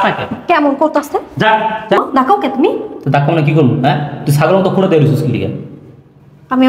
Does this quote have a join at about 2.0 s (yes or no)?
yes